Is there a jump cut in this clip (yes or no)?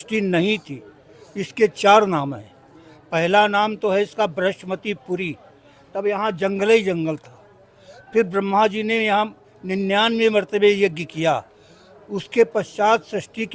no